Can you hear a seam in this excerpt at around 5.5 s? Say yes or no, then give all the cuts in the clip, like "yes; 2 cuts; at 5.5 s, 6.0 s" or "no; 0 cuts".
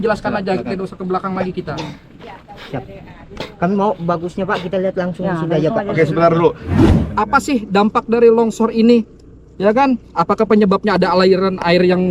no; 1 cut; at 6.8 s